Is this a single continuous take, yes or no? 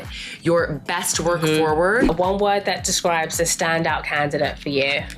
no